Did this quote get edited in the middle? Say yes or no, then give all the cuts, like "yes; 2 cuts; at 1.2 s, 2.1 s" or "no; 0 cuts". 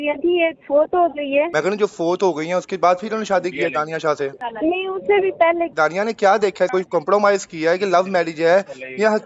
no; 0 cuts